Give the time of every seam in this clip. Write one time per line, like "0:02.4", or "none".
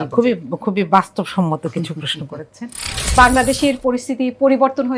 0:03.0